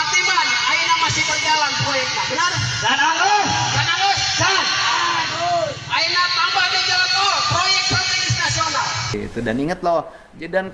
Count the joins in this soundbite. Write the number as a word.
one